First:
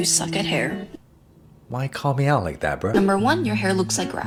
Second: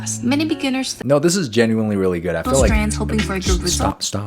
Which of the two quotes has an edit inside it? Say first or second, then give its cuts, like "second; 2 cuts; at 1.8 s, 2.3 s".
second; 1 cut; at 0.9 s